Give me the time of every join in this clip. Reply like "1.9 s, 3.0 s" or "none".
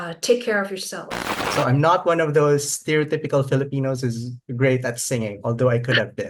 1.5 s